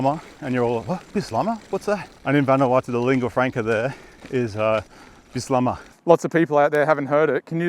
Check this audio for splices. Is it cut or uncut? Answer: cut